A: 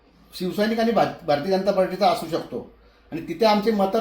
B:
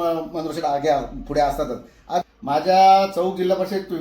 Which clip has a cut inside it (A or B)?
B